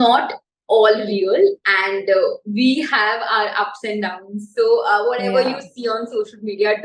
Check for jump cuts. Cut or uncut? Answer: uncut